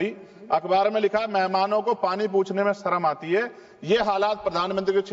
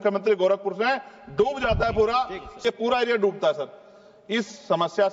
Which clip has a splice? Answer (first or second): second